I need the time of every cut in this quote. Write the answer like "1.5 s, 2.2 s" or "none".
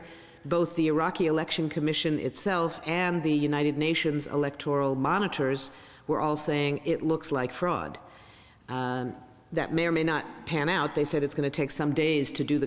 1.1 s